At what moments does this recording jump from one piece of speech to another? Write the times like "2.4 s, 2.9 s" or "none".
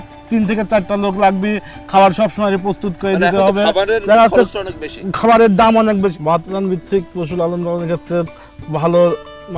6.2 s